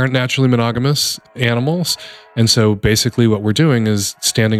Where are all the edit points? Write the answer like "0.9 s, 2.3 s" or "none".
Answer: 1.2 s

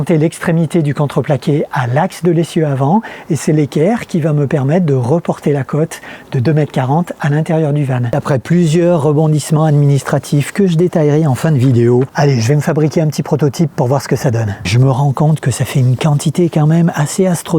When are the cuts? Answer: 8.1 s, 12.1 s, 14.7 s

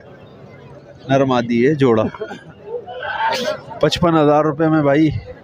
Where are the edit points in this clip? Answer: 3.3 s

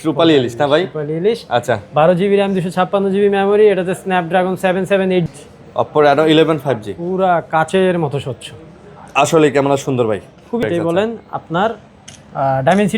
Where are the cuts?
5.3 s, 10.6 s

